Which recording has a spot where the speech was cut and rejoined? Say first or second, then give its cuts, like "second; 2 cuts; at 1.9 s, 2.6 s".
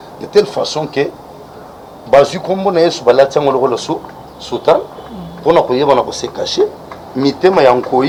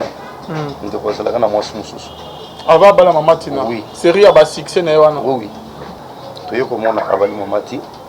second; 1 cut; at 5.9 s